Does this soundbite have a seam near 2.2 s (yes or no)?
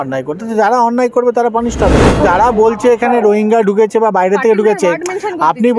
yes